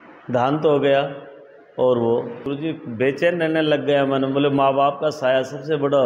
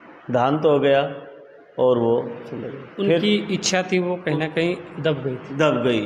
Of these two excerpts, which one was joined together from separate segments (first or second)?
first